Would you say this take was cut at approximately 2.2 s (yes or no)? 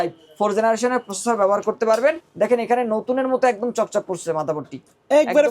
yes